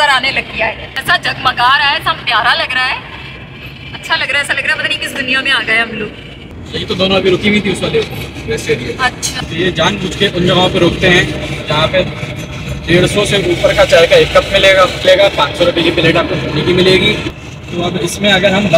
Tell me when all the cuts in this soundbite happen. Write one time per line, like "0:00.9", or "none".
0:00.9
0:06.5
0:09.4